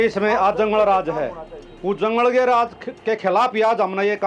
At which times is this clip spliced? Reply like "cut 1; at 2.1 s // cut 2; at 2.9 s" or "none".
none

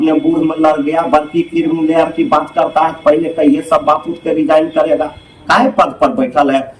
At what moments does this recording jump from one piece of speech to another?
none

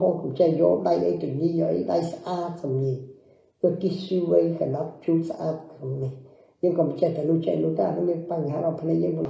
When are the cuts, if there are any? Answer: none

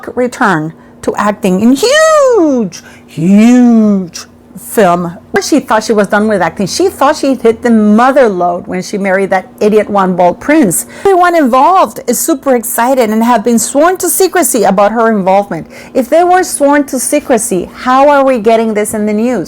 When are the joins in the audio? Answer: cut 1; at 5.4 s // cut 2; at 11.0 s

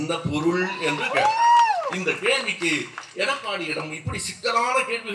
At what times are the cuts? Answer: none

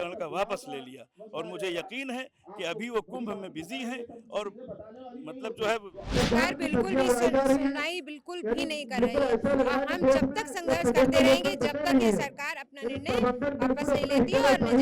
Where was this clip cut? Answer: cut 1; at 6.0 s

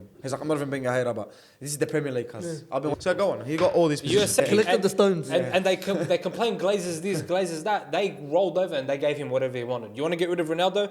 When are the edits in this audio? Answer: cut 1; at 2.9 s // cut 2; at 4.4 s

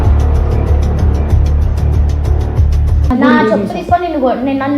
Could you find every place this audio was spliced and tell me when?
cut 1; at 3.1 s

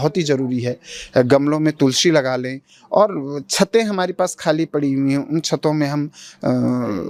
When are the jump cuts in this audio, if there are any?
none

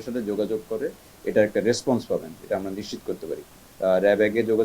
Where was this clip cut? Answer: cut 1; at 3.6 s

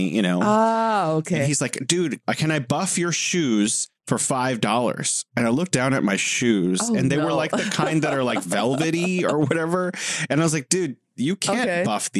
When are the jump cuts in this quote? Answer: none

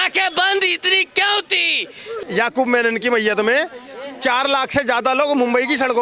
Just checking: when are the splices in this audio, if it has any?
cut 1; at 2.3 s

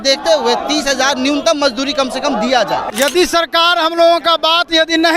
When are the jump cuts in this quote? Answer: cut 1; at 2.9 s

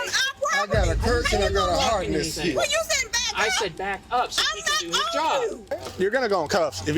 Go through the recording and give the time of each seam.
cut 1; at 5.8 s

